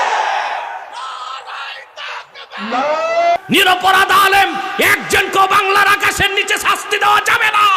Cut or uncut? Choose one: cut